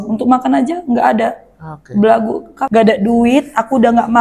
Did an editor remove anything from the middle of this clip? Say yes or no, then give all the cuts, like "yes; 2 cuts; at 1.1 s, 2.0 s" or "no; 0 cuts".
yes; 1 cut; at 2.5 s